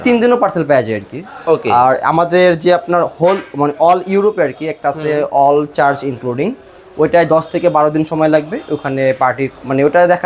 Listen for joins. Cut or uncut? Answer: uncut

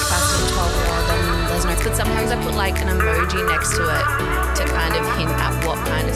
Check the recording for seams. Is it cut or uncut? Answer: uncut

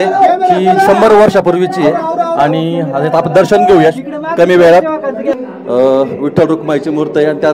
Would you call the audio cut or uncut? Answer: cut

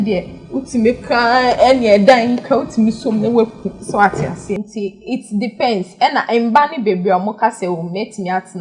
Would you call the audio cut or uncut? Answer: cut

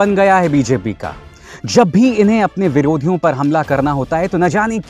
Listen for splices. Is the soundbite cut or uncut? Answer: uncut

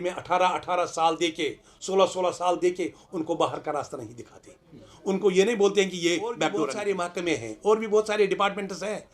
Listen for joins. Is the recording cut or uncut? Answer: cut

